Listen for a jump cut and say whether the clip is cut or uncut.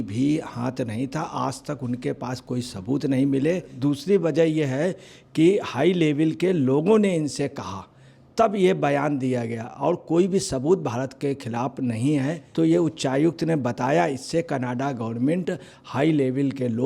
cut